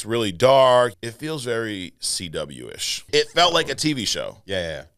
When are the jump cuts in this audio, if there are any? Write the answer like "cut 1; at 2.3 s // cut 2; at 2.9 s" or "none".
cut 1; at 1.0 s // cut 2; at 3.0 s